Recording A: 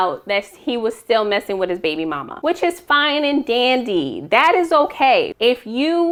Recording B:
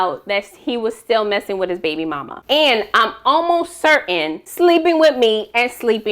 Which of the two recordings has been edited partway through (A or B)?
B